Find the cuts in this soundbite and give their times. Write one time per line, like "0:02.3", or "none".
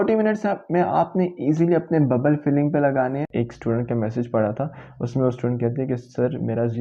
0:03.3

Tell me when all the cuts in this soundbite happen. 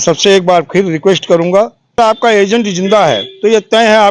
0:02.0

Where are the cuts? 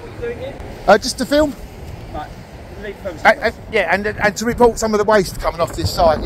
none

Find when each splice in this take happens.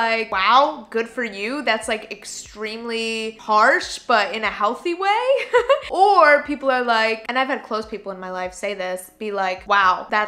none

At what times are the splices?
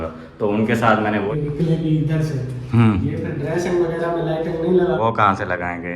0:01.3
0:05.0

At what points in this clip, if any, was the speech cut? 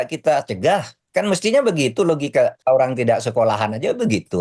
0:02.6

